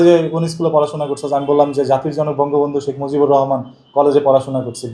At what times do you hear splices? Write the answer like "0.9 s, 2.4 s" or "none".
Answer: none